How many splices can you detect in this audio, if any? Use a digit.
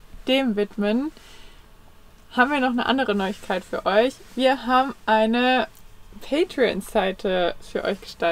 0